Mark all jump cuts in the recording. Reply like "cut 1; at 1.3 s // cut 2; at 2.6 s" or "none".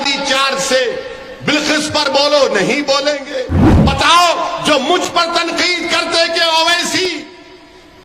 cut 1; at 3.6 s